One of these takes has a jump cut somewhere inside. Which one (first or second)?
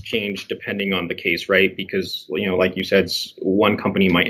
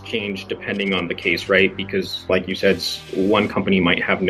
second